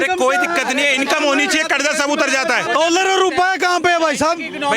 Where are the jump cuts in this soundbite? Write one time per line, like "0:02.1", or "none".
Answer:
0:02.7